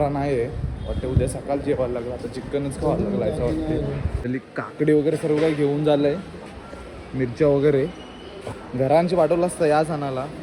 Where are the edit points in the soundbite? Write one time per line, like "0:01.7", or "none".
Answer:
0:04.1